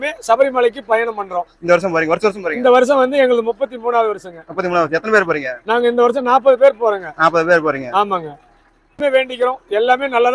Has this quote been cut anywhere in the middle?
no; 0 cuts

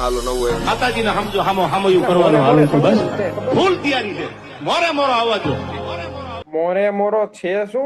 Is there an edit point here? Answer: yes; 1 cut; at 6.4 s

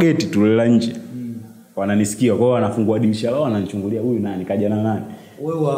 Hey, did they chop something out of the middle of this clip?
no; 0 cuts

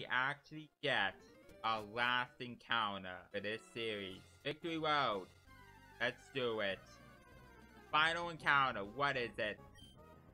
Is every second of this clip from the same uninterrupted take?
no; 3 cuts; at 3.2 s, 4.6 s, 9.6 s

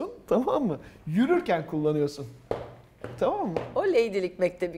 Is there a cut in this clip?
no; 0 cuts

